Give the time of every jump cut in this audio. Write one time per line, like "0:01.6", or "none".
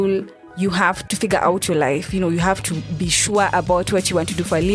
0:01.1